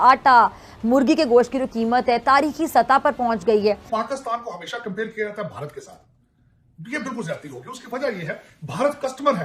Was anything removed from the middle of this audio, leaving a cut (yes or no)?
no